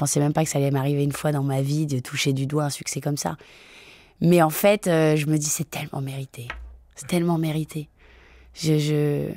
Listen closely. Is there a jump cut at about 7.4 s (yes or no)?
no